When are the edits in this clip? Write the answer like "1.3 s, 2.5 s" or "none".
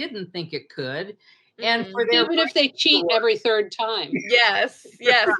none